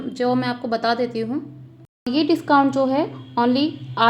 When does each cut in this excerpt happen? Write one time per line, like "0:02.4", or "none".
0:02.1